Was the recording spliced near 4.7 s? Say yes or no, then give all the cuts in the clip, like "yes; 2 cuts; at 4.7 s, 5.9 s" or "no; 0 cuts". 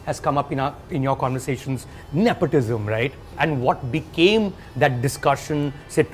no; 2 cuts; at 1.9 s, 3.4 s